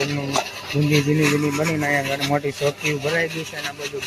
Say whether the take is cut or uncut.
uncut